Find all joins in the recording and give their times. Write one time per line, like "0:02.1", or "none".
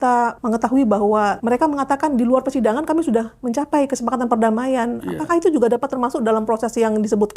0:01.4